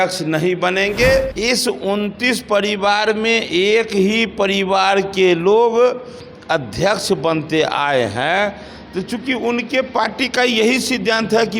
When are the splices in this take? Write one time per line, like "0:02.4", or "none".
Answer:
0:01.3